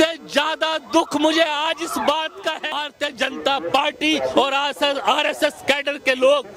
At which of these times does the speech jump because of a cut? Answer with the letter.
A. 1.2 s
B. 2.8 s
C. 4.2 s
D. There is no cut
B